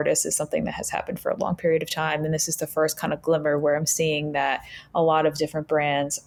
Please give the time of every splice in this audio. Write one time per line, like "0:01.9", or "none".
none